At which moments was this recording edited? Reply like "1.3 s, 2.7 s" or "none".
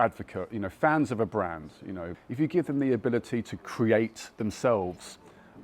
2.0 s